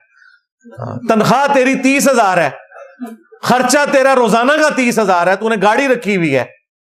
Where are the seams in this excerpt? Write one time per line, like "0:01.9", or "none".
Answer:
none